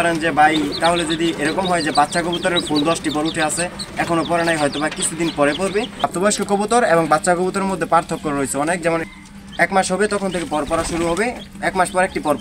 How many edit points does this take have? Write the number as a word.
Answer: two